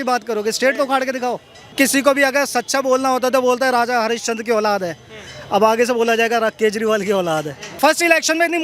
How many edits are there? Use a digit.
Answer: 2